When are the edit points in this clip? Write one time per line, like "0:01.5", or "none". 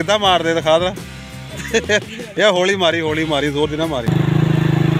0:04.1